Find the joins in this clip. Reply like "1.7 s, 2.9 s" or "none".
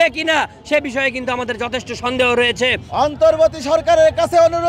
2.8 s